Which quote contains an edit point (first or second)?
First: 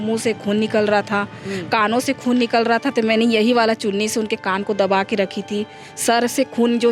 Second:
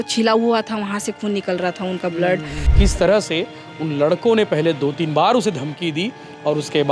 second